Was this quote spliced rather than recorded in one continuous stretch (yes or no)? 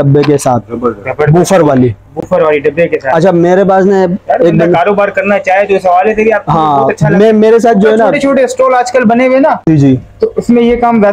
no